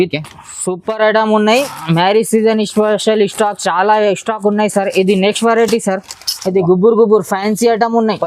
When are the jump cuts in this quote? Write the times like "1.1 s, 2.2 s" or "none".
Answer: 1.6 s